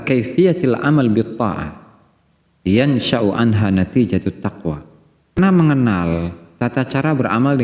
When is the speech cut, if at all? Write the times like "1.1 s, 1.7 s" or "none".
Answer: 5.4 s